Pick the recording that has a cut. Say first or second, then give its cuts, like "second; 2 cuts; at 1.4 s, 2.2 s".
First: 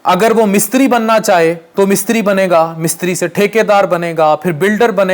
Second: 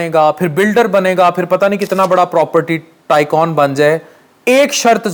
first; 1 cut; at 1.6 s